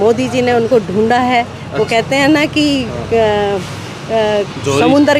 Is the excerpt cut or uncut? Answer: uncut